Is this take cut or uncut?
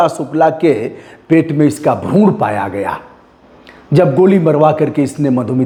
uncut